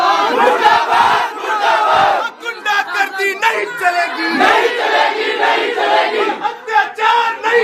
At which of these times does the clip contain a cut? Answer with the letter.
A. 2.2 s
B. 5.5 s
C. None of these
C